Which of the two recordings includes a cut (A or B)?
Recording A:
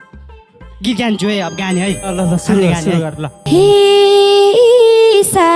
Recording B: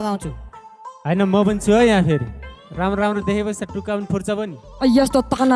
A